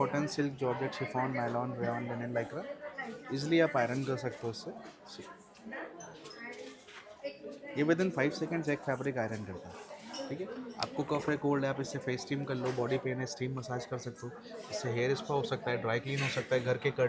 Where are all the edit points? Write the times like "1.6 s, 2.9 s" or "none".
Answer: none

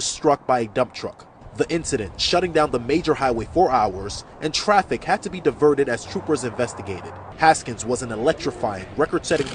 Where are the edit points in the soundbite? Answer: 1.4 s

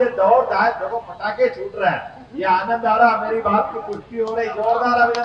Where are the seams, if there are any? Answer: none

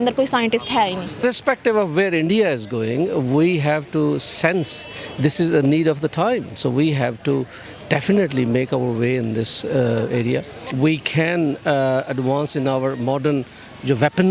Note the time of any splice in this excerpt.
1.2 s, 10.6 s

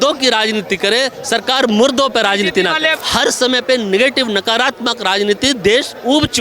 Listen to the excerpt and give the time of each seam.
3.0 s

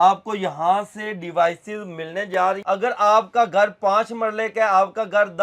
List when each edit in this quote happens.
2.6 s

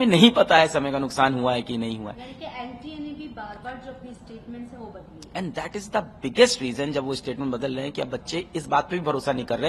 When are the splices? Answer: none

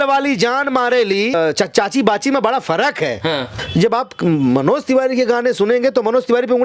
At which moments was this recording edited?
1.3 s, 3.5 s

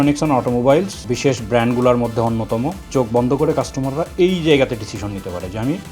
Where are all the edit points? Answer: 1.0 s

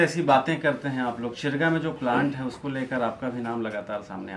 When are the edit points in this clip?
none

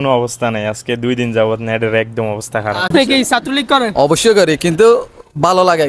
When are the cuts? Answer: 2.9 s

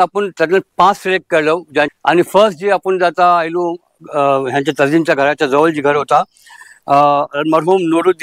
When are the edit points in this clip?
1.9 s

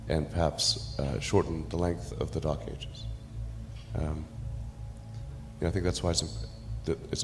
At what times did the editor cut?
4.3 s, 5.6 s

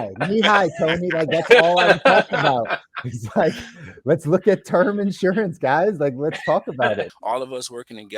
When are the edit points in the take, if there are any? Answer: 7.1 s

